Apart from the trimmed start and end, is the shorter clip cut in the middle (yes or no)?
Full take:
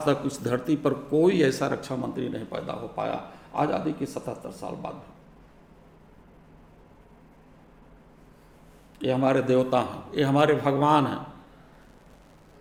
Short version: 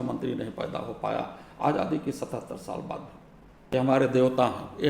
yes